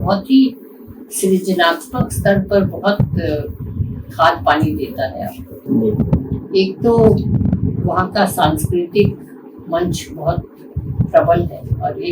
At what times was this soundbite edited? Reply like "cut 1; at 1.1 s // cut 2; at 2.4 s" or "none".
none